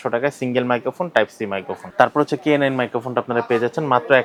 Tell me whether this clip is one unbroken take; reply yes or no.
yes